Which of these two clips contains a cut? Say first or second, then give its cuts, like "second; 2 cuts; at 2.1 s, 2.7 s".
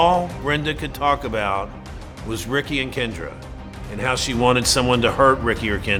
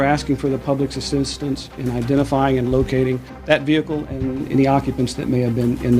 second; 1 cut; at 3.3 s